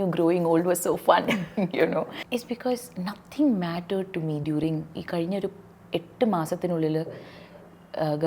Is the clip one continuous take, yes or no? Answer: no